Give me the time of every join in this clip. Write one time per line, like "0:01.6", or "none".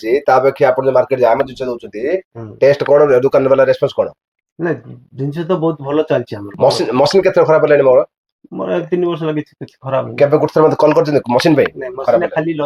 none